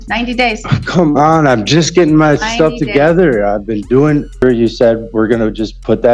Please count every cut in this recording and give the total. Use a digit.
1